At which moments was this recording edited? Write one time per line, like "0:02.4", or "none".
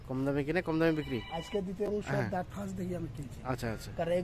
0:01.9